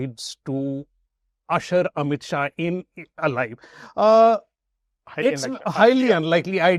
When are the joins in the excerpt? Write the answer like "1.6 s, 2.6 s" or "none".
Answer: none